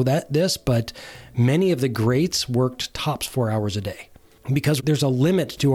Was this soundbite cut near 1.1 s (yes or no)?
no